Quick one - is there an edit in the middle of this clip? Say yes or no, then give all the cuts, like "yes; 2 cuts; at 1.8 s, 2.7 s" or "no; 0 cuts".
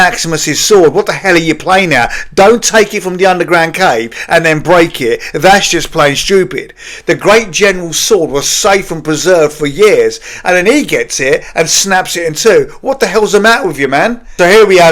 no; 0 cuts